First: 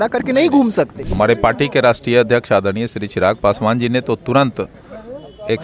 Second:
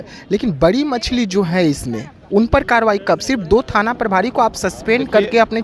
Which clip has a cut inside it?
first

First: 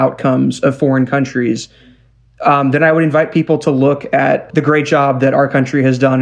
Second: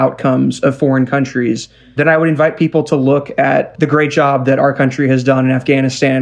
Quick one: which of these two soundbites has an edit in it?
second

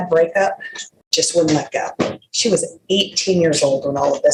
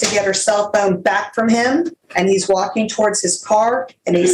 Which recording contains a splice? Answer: second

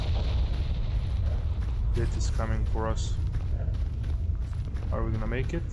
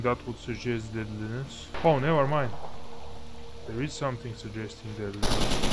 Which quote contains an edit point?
second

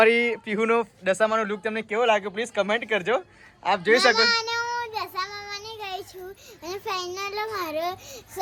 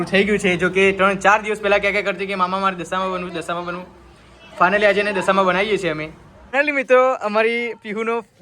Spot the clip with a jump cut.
second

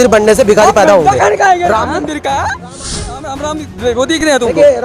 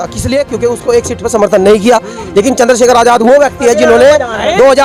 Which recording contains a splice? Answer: first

